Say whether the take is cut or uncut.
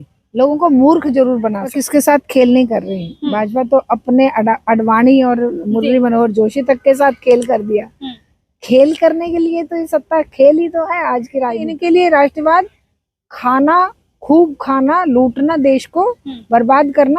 cut